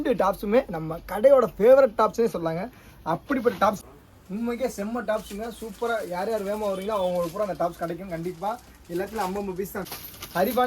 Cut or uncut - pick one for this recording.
cut